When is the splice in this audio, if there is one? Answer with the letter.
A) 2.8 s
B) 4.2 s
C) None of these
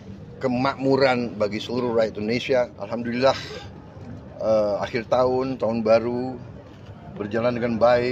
A